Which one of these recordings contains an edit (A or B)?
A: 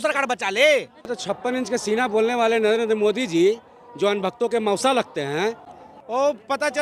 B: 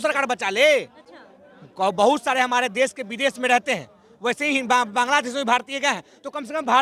A